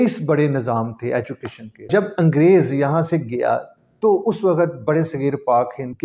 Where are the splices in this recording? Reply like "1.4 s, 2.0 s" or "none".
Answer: 1.9 s